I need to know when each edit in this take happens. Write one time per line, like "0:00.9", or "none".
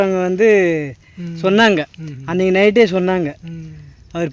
none